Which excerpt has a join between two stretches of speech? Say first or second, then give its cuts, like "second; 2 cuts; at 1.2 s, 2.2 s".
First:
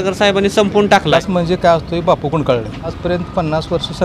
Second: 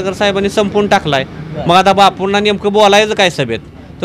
first; 2 cuts; at 1.2 s, 3.0 s